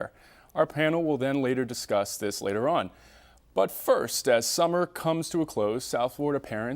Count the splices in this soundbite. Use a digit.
1